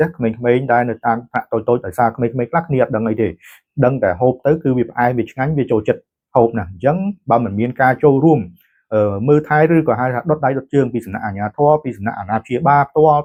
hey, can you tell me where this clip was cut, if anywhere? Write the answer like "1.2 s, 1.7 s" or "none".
none